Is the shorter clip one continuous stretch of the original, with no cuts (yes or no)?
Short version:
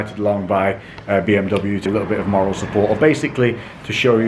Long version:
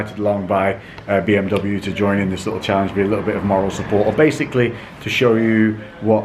no